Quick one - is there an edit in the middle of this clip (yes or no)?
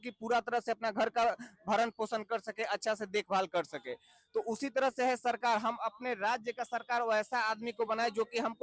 no